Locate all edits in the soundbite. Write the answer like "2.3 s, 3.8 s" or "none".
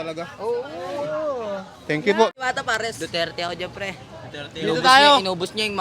2.4 s